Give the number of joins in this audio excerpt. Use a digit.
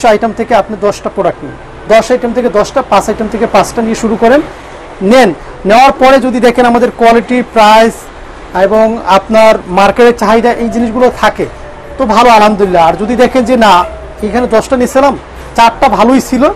0